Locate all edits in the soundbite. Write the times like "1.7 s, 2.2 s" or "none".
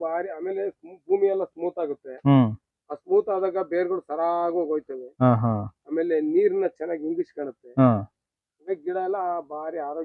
none